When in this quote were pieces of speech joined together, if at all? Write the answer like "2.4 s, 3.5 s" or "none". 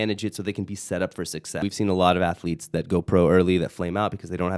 1.6 s